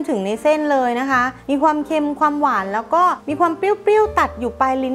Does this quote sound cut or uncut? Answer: cut